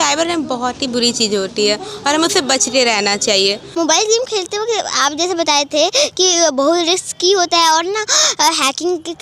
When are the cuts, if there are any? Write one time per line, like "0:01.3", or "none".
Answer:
0:03.7